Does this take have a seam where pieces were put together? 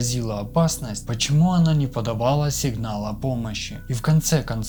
no; 0 cuts

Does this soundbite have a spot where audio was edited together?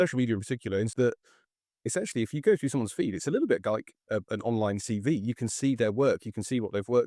yes; 1 cut; at 0.9 s

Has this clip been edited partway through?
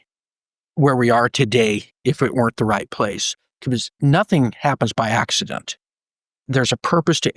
yes; 2 cuts; at 4.0 s, 6.5 s

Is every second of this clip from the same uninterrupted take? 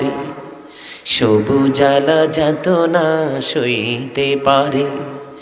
yes; 0 cuts

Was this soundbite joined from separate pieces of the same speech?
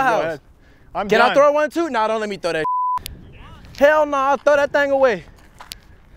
no; 0 cuts

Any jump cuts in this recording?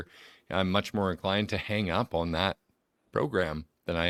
no; 0 cuts

